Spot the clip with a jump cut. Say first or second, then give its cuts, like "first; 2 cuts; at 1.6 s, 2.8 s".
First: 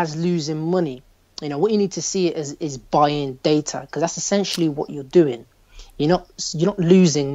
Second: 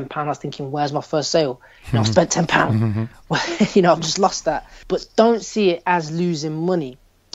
second; 1 cut; at 4.7 s